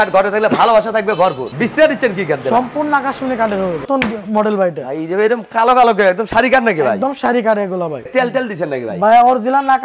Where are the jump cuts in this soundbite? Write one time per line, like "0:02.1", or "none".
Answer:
0:01.5
0:03.8
0:08.1